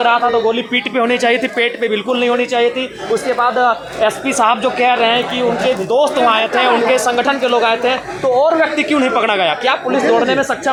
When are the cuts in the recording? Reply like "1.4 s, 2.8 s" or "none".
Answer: none